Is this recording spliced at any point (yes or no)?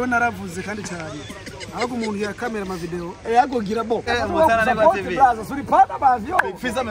yes